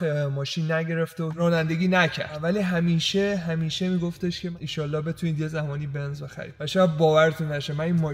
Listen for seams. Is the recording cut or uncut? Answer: cut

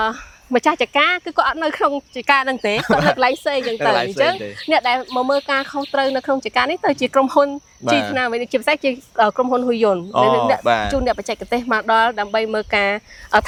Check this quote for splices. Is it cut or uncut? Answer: uncut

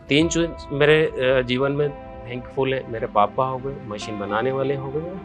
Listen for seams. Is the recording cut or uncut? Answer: uncut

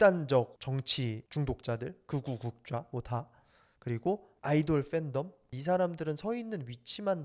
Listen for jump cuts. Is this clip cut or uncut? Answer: cut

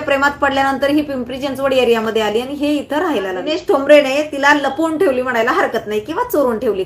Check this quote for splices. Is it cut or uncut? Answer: cut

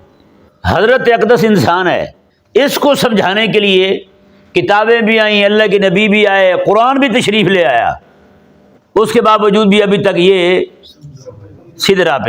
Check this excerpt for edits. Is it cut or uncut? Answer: cut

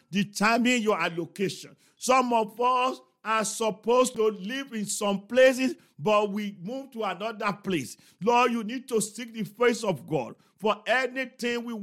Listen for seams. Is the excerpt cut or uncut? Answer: cut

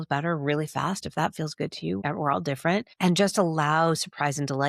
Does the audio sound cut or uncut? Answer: cut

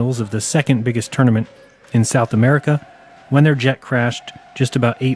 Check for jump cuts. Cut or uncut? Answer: cut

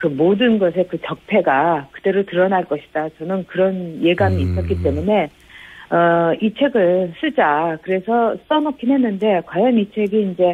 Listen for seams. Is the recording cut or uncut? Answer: uncut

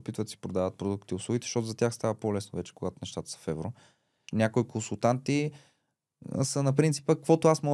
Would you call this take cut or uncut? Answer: cut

